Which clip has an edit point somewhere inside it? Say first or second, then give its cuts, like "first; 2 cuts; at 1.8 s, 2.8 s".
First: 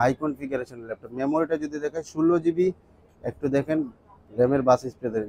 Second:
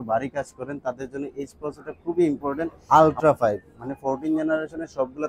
second; 1 cut; at 2.8 s